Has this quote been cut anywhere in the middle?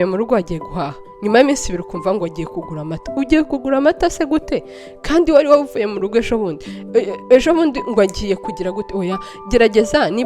no; 0 cuts

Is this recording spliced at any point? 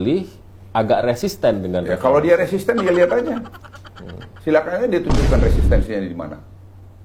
no; 0 cuts

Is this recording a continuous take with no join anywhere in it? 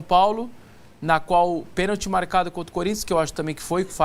yes; 0 cuts

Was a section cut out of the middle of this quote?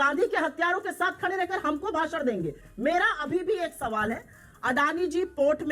no; 0 cuts

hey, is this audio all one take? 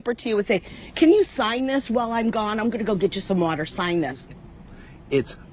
no; 1 cut; at 4.2 s

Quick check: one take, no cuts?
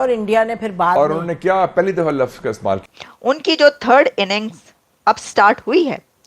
no; 1 cut; at 2.9 s

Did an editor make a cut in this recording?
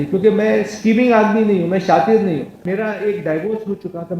yes; 1 cut; at 2.6 s

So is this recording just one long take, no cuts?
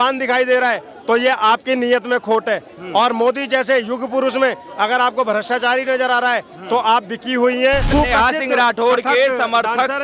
no; 1 cut; at 7.9 s

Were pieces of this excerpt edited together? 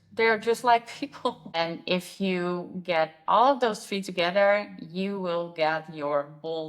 yes; 1 cut; at 1.4 s

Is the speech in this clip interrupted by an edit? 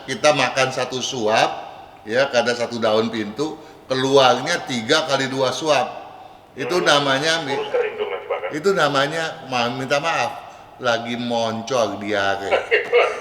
no; 0 cuts

